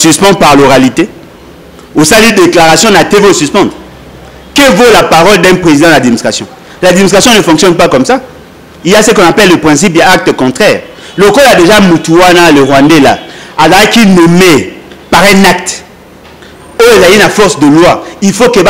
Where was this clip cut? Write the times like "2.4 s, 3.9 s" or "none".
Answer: none